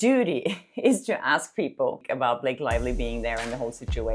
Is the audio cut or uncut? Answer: cut